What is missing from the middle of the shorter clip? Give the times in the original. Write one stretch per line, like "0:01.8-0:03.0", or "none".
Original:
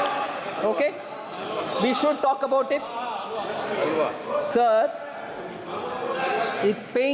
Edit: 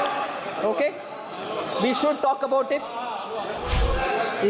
0:03.6-0:05.8